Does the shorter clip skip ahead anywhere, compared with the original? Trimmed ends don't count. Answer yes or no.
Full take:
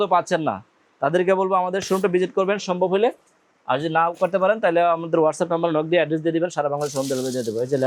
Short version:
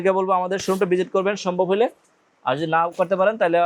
no